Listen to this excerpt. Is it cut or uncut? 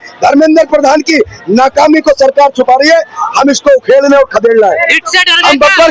uncut